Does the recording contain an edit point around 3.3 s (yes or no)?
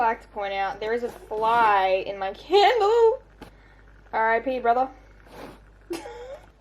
no